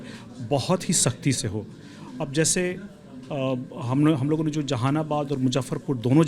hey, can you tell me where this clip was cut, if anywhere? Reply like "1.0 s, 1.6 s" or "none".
none